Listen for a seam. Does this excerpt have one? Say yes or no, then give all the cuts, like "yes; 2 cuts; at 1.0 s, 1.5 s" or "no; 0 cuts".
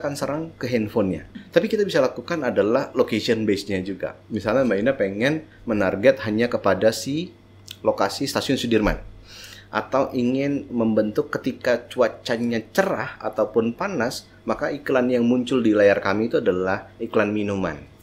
yes; 1 cut; at 1.3 s